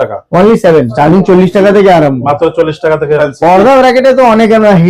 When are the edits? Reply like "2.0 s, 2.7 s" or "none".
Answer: 0.9 s, 3.2 s